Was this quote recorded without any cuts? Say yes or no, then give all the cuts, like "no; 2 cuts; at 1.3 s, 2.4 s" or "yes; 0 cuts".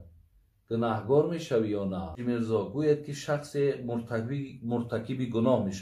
no; 1 cut; at 2.2 s